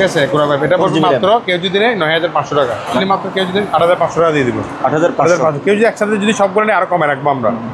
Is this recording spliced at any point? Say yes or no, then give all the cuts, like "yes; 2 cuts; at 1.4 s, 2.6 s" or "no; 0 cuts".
yes; 1 cut; at 3.0 s